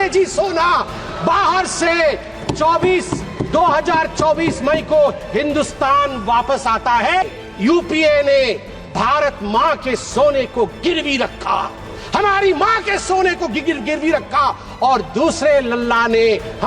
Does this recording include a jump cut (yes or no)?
yes